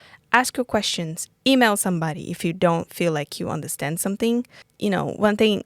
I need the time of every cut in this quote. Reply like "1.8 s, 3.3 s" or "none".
4.6 s